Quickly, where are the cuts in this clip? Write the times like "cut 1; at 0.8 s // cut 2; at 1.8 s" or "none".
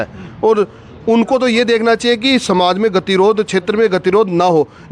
none